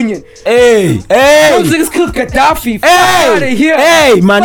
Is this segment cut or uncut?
uncut